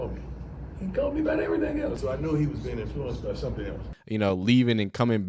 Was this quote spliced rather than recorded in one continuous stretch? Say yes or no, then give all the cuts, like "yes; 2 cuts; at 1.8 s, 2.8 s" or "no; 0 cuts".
yes; 2 cuts; at 2.0 s, 3.9 s